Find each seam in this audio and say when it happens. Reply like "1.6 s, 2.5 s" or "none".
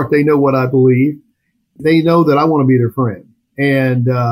1.7 s